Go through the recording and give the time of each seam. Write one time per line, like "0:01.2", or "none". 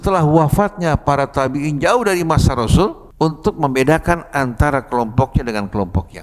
0:03.0

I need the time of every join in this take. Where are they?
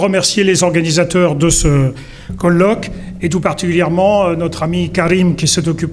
0:02.3

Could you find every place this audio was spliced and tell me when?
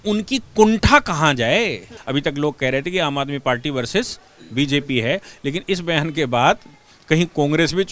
0:02.0

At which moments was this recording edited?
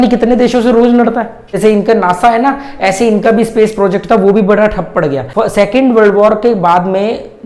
0:01.6
0:05.2

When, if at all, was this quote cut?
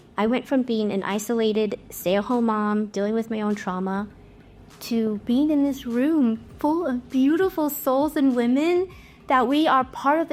none

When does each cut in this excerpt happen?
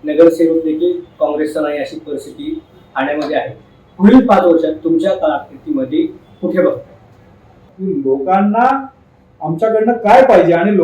0:07.7

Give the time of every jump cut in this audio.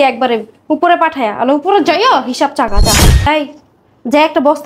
0:03.2

